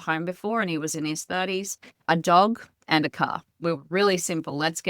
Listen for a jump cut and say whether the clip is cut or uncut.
cut